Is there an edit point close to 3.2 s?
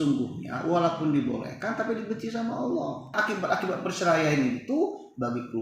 yes; 1 cut; at 3.2 s

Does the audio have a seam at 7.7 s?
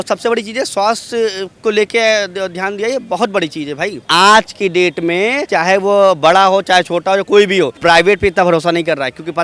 yes; 3 cuts; at 4.0 s, 5.5 s, 7.7 s

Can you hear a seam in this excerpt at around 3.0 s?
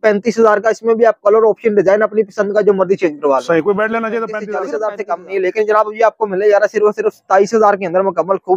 no; 1 cut; at 4.4 s

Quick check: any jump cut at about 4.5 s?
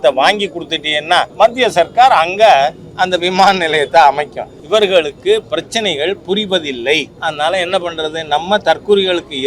yes; 3 cuts; at 1.3 s, 4.5 s, 7.1 s

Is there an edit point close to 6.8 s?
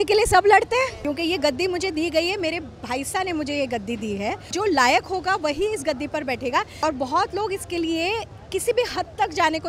yes; 3 cuts; at 1.0 s, 4.5 s, 6.8 s

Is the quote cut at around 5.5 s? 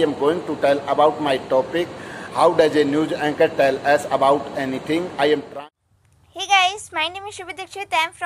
yes; 1 cut; at 5.5 s

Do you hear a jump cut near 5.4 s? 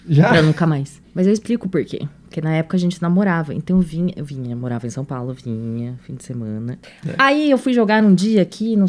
no; 2 cuts; at 1.0 s, 6.8 s

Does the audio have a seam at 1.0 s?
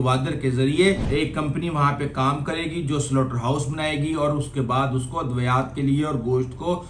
yes; 1 cut; at 1.0 s

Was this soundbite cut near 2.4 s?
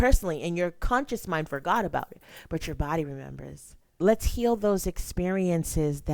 no; 1 cut; at 3.9 s

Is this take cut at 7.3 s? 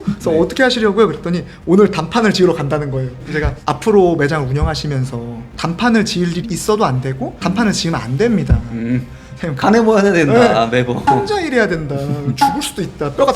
no; 1 cut; at 9.7 s

